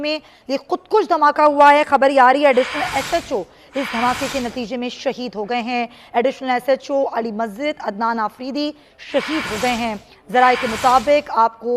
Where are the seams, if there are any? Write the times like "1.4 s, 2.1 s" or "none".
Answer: none